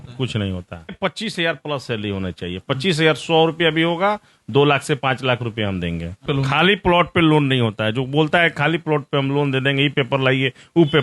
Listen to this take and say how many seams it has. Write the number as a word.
two